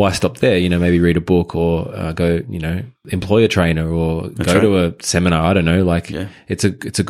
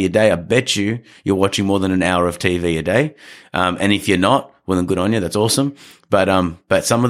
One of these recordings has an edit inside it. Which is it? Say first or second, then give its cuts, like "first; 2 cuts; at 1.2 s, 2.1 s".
first; 1 cut; at 3.0 s